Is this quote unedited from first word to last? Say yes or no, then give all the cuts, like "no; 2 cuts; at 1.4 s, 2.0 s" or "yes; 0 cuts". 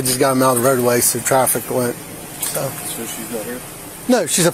yes; 0 cuts